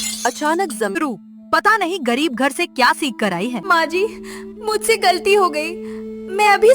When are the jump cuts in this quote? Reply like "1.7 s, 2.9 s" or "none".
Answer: 1.0 s, 3.6 s